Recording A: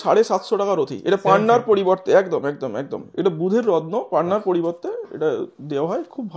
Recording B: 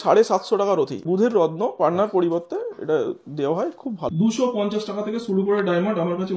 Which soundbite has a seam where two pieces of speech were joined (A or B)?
B